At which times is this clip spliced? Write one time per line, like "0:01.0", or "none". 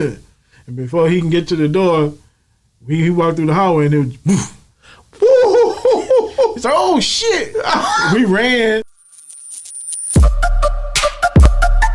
0:08.9